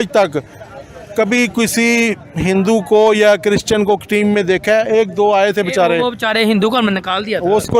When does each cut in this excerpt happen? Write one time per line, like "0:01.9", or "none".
none